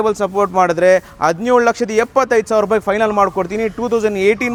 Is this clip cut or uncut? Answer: uncut